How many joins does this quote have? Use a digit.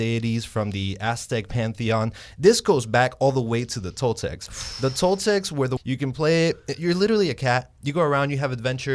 1